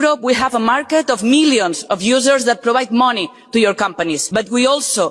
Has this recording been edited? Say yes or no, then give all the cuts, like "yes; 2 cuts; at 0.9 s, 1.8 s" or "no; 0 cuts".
no; 0 cuts